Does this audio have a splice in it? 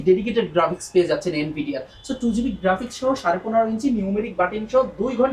no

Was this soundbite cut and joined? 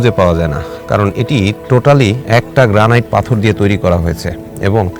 no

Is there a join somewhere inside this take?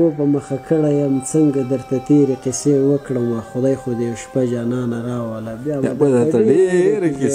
no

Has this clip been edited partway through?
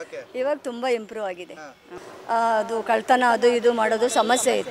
yes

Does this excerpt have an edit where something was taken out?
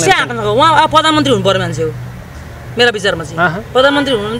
no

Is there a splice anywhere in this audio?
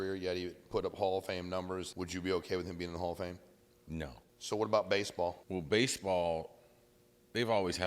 yes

